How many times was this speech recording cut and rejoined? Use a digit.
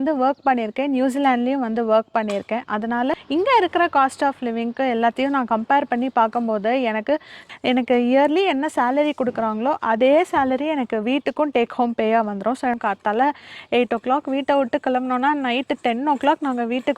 3